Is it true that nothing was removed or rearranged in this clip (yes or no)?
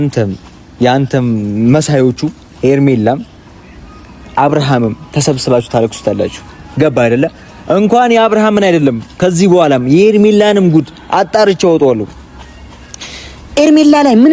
yes